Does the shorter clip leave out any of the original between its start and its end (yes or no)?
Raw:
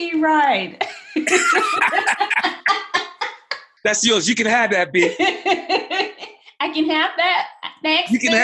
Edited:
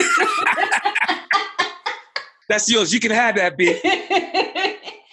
no